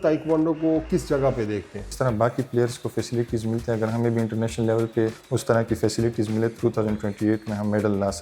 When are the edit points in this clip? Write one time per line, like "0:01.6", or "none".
0:01.9
0:05.3
0:06.6